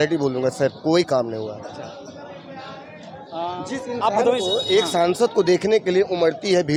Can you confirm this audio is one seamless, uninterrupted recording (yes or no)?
yes